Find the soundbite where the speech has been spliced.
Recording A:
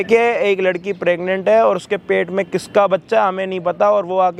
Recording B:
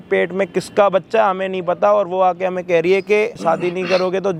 B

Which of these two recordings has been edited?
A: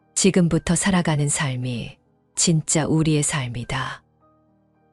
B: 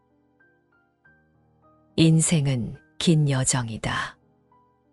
B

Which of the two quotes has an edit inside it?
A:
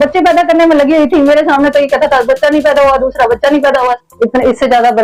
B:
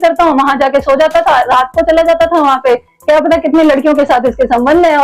A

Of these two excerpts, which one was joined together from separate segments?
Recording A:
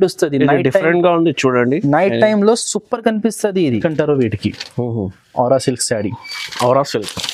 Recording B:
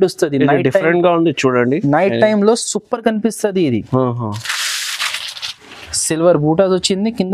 A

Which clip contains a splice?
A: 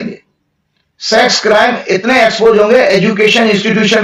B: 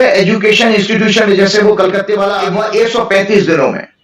B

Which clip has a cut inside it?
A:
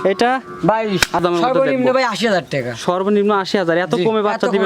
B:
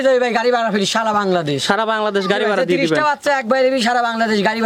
A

